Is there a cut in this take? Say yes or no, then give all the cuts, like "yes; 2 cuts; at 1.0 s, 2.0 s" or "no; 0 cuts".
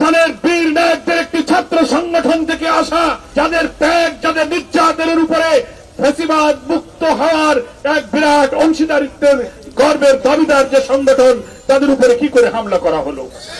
yes; 1 cut; at 3.2 s